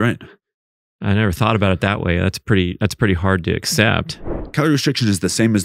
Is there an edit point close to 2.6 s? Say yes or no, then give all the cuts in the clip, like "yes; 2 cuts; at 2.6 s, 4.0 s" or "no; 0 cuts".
no; 1 cut; at 4.4 s